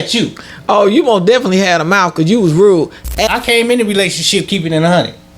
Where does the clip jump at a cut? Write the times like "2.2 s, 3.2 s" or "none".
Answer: 3.3 s